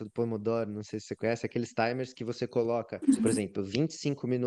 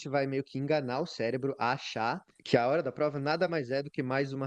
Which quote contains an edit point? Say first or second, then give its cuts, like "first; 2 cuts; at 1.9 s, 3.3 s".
second; 1 cut; at 2.3 s